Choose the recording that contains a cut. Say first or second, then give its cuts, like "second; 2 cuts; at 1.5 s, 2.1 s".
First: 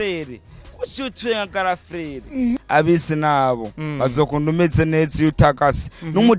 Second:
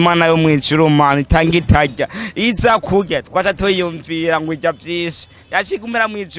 first; 1 cut; at 2.6 s